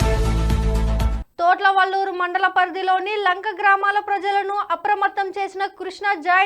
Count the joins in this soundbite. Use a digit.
1